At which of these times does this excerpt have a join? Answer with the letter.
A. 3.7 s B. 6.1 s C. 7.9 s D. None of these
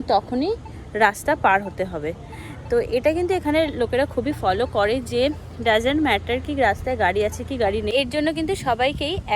C